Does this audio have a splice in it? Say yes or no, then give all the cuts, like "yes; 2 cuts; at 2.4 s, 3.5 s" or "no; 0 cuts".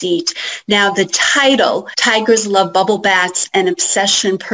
yes; 1 cut; at 1.9 s